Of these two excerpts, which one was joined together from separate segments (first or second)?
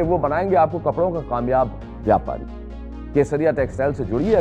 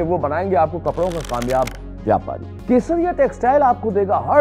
second